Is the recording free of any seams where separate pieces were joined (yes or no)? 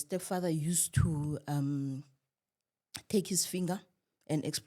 yes